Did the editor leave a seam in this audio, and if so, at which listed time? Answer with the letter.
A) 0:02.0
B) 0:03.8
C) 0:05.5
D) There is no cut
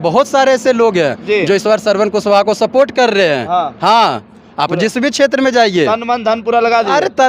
D